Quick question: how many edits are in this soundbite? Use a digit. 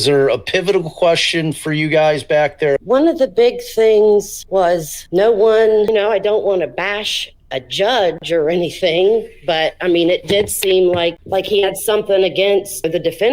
2